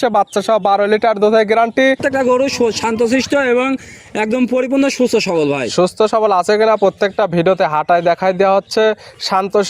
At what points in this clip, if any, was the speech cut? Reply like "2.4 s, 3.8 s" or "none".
2.0 s

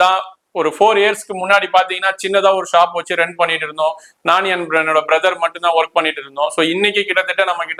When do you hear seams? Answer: none

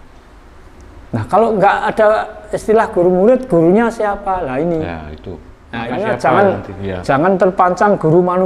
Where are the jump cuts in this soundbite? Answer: 5.9 s

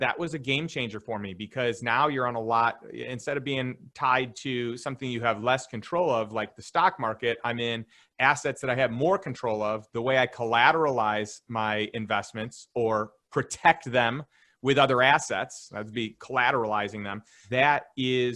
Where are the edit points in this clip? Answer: 17.4 s

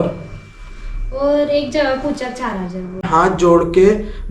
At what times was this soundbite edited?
3.1 s

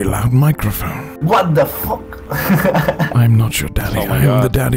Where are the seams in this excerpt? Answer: 1.2 s, 3.1 s

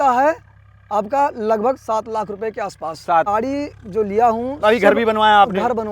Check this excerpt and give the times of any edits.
3.3 s

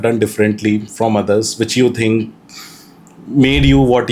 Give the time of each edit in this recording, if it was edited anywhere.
none

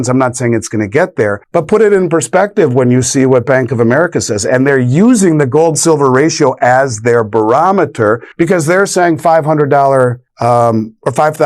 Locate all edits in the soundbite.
1.4 s, 8.3 s, 10.3 s

